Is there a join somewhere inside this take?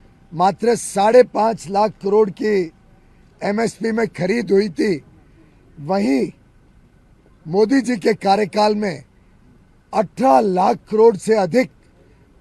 no; 0 cuts

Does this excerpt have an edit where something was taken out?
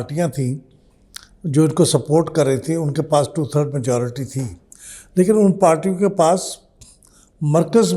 no; 0 cuts

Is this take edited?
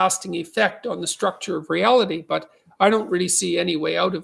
no; 0 cuts

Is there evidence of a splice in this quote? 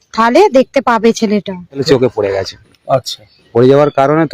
yes; 1 cut; at 1.8 s

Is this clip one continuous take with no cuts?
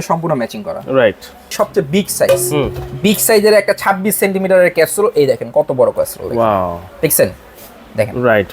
no; 1 cut; at 1.5 s

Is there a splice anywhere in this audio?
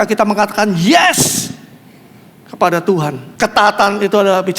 no; 0 cuts

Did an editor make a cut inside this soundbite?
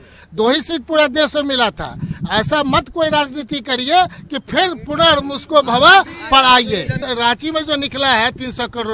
yes; 1 cut; at 7.0 s

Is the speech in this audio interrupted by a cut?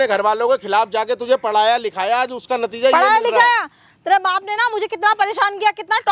no; 0 cuts

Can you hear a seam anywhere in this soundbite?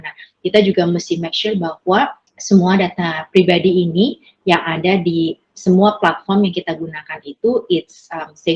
yes; 1 cut; at 2.3 s

